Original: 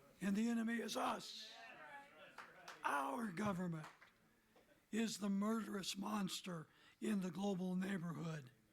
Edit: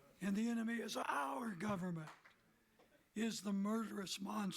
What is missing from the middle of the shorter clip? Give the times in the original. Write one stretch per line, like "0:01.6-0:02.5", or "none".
0:01.0-0:02.8